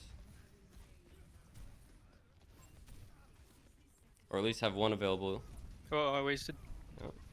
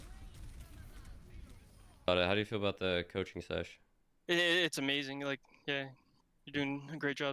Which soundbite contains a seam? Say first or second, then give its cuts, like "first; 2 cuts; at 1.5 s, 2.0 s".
second; 1 cut; at 2.1 s